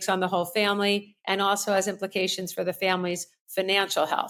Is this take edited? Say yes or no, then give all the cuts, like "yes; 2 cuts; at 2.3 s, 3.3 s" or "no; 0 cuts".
no; 0 cuts